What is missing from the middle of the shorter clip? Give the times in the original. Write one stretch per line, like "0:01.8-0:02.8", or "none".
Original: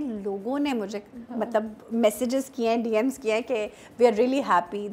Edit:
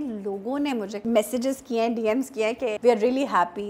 0:00.9-0:01.8
0:03.6-0:03.9